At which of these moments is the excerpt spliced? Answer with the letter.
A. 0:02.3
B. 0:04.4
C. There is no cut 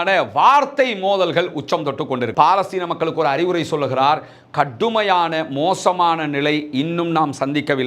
A